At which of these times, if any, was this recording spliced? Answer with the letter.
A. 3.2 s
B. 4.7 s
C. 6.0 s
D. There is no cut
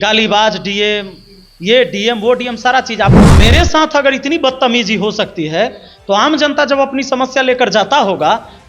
A